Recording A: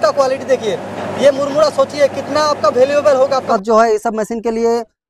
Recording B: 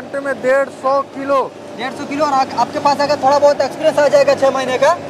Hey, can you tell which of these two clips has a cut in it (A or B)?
A